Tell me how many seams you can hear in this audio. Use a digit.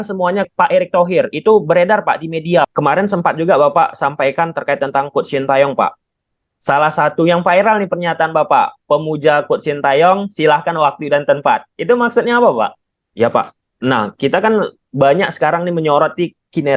2